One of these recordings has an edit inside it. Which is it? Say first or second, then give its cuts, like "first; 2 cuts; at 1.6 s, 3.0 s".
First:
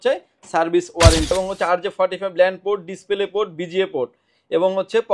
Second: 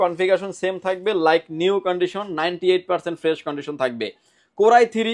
first; 1 cut; at 1.3 s